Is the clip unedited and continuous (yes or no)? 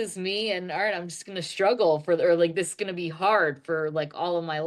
yes